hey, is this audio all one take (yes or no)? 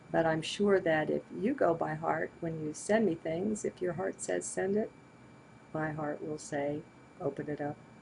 yes